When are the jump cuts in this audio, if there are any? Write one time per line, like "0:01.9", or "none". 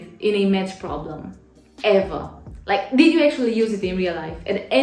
none